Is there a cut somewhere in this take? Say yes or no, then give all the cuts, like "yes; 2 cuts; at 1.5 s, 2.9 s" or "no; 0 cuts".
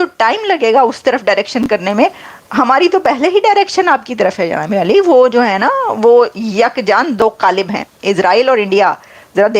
no; 0 cuts